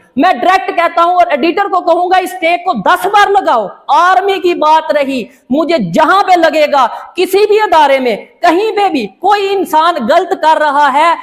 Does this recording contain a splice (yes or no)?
no